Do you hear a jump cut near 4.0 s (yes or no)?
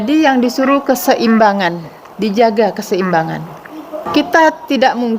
yes